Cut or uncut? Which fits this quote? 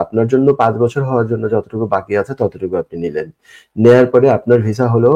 uncut